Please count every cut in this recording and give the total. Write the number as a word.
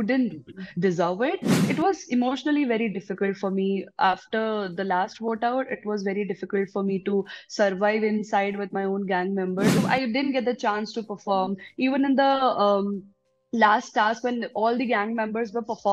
two